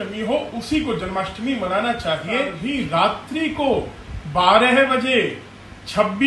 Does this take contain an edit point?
yes; 1 cut; at 2.6 s

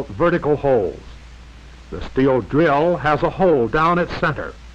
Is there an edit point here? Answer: yes; 1 cut; at 2.3 s

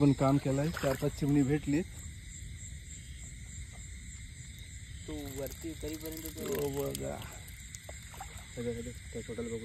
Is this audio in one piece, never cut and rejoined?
yes; 0 cuts

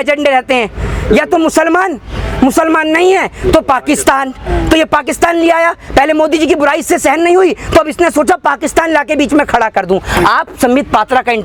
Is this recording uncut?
yes; 0 cuts

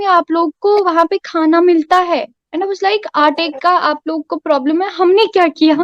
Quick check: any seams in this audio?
no; 0 cuts

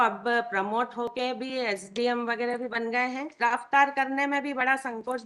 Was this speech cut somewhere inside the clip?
yes; 1 cut; at 3.4 s

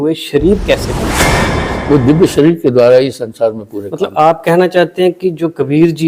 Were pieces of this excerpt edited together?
yes; 1 cut; at 1.3 s

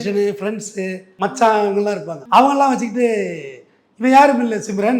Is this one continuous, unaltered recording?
no; 2 cuts; at 1.0 s, 2.1 s

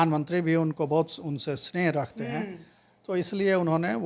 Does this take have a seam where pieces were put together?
no; 0 cuts

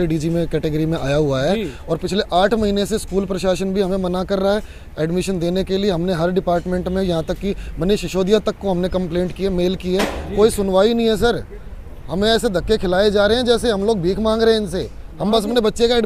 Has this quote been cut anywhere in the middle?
no; 0 cuts

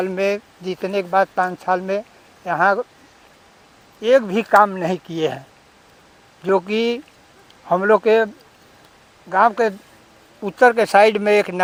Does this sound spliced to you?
no; 0 cuts

